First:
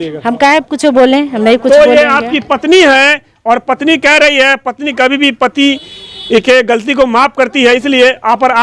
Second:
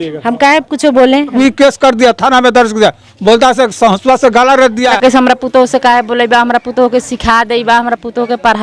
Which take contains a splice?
second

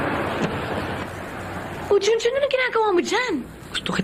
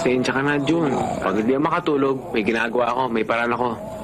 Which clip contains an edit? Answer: second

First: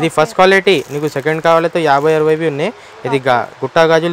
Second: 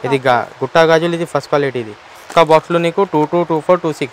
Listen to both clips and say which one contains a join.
second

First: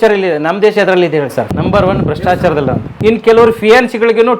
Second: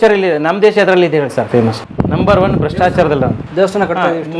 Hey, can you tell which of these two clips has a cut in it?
first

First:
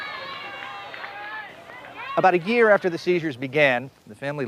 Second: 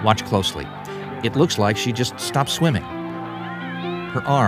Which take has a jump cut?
second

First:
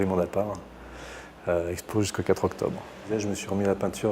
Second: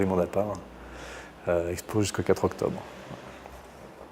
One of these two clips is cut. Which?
first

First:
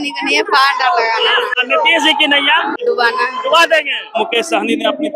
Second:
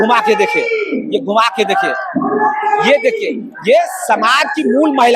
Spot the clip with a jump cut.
first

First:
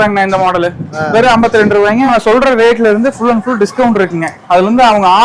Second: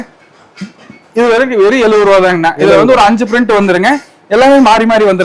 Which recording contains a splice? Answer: first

